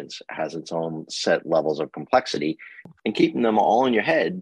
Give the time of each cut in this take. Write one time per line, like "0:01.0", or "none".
0:02.7